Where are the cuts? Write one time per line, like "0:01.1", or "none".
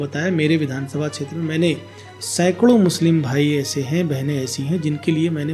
none